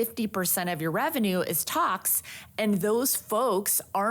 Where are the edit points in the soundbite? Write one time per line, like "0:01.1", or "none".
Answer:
none